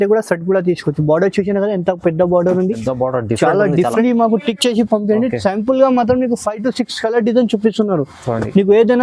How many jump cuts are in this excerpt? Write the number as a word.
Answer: one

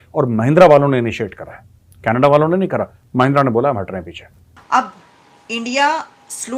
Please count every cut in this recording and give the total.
one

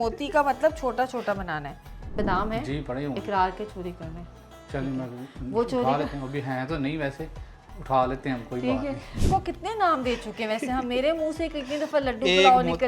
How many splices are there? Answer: two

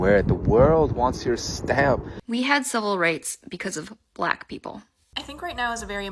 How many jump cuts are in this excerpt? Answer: one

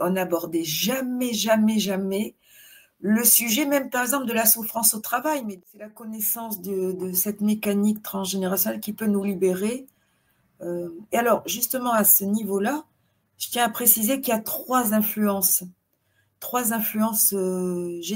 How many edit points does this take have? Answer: one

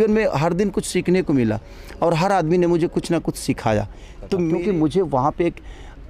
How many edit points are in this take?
one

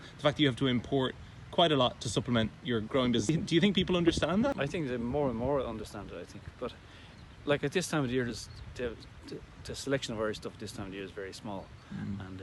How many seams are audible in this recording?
two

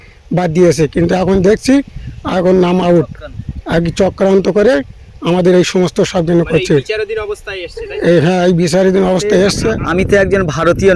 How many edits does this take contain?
zero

